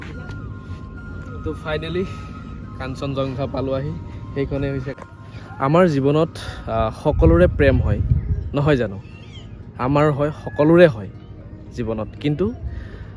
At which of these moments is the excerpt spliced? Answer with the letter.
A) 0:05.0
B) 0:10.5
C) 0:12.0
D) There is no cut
A